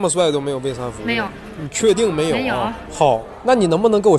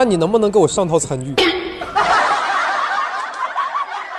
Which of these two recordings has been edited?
first; 2 cuts; at 1.1 s, 2.5 s

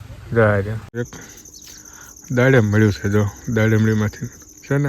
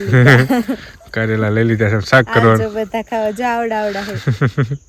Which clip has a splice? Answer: first; 1 cut; at 1.2 s

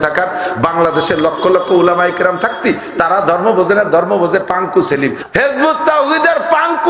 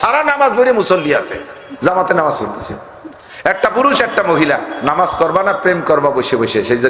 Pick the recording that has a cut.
first; 1 cut; at 5.2 s

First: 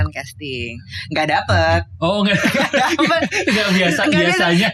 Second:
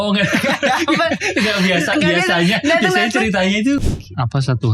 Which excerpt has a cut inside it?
second; 1 cut; at 3.8 s

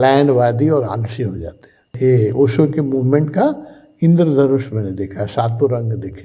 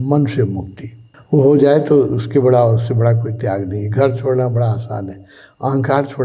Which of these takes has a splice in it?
first; 1 cut; at 1.9 s

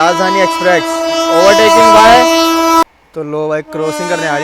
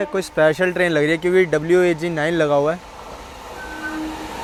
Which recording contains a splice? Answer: first; 1 cut; at 2.8 s

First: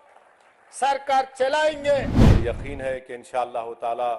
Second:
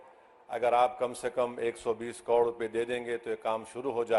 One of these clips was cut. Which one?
first; 1 cut; at 2.2 s

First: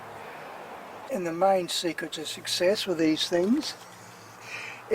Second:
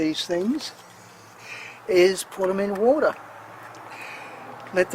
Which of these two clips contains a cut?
first; 1 cut; at 1.1 s

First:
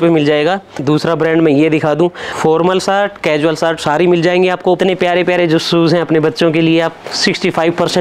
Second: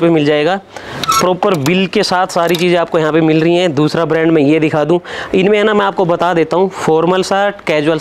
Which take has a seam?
first; 3 cuts; at 0.8 s, 2.3 s, 4.8 s

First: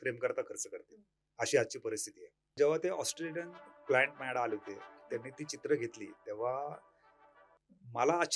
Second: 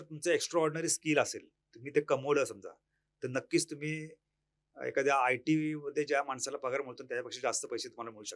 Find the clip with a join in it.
first; 1 cut; at 2.6 s

